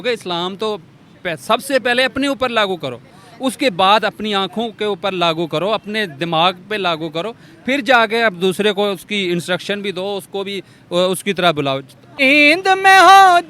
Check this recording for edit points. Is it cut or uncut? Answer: cut